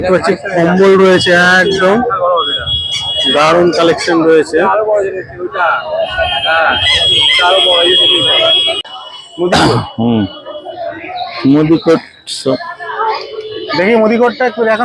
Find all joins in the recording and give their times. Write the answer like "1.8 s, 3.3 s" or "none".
8.8 s